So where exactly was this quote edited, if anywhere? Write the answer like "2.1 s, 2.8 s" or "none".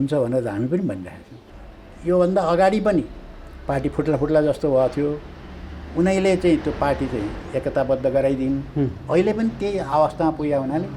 1.3 s

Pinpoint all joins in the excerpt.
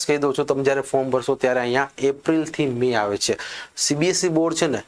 none

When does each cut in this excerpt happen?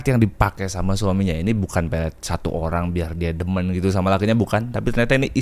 none

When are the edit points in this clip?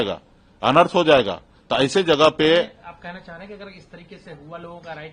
none

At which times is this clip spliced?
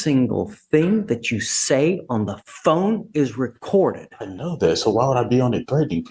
none

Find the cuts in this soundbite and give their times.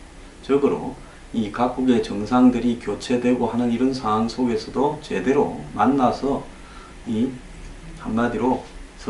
none

